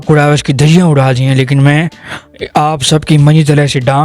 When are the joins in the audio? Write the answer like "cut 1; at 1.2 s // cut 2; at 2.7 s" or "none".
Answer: none